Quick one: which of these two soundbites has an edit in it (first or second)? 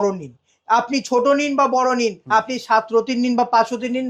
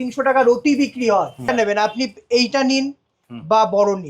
second